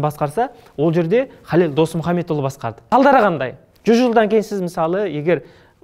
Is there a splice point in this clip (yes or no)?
yes